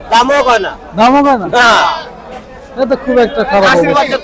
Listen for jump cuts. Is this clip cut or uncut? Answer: uncut